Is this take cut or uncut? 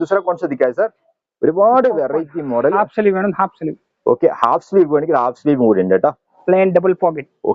cut